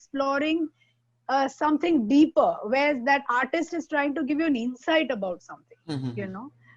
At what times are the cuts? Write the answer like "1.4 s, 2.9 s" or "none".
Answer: none